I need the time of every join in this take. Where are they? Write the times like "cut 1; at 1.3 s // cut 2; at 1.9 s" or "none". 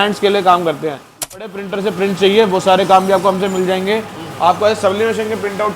cut 1; at 1.5 s